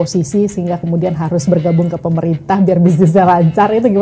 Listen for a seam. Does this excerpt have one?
no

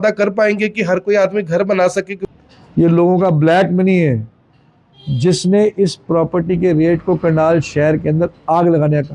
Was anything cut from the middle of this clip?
yes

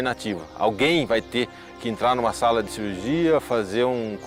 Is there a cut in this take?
no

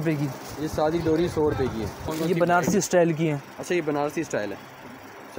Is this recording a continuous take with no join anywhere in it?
no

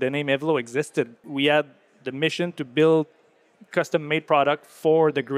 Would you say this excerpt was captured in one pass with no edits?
no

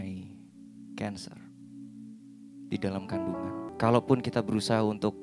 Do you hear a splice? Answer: yes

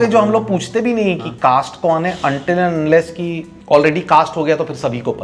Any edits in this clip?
yes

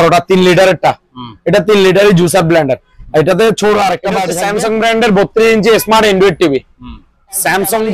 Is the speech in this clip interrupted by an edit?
yes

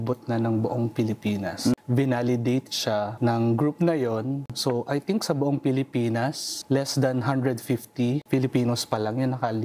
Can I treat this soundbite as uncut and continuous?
no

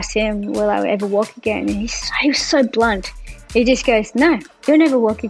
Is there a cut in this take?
no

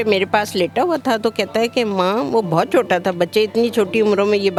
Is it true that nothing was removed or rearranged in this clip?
yes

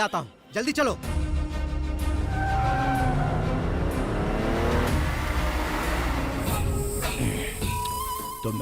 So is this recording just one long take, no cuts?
no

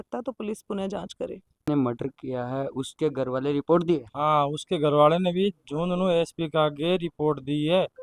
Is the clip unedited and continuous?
no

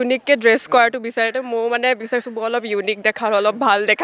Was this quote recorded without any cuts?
yes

